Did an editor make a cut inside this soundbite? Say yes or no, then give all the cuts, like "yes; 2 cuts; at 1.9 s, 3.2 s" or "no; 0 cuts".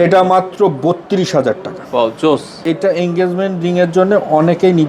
yes; 1 cut; at 2.6 s